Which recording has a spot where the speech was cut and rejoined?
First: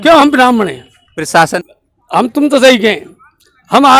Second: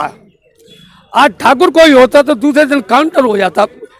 first; 1 cut; at 1.6 s

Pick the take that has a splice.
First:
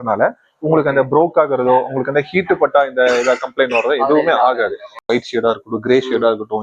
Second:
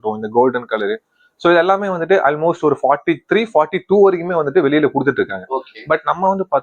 first; 1 cut; at 5.1 s

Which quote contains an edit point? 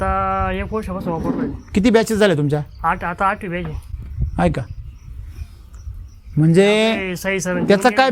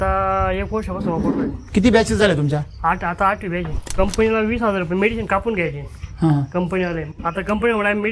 second; 2 cuts; at 3.9 s, 7.1 s

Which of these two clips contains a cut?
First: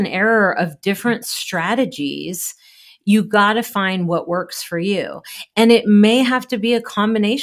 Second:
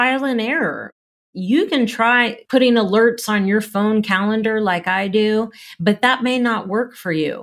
second; 2 cuts; at 1.2 s, 2.4 s

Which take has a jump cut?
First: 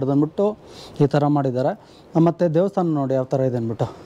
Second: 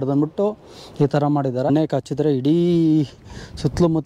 second; 1 cut; at 1.7 s

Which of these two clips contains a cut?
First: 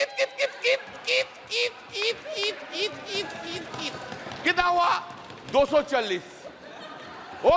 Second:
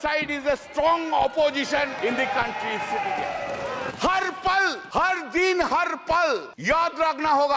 second; 4 cuts; at 1.9 s, 3.9 s, 4.8 s, 6.5 s

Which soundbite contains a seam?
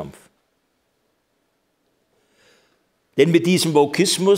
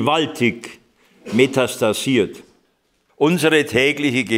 second; 1 cut; at 3.0 s

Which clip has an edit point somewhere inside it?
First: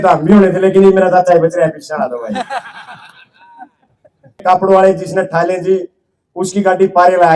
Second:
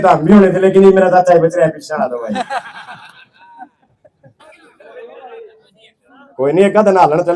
first; 1 cut; at 4.4 s

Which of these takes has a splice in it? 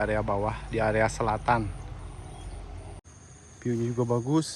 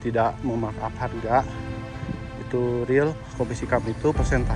first; 1 cut; at 3.1 s

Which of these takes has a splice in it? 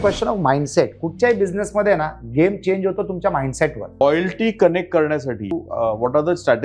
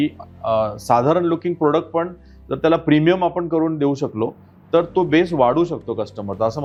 first; 2 cuts; at 4.0 s, 5.6 s

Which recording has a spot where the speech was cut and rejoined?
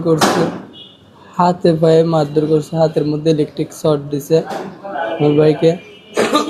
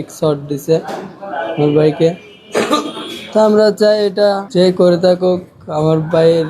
second; 1 cut; at 4.4 s

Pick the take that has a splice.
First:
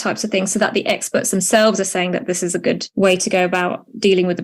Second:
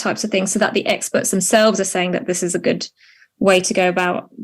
first; 1 cut; at 2.9 s

